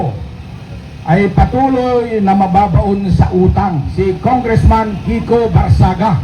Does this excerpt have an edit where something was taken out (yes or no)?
yes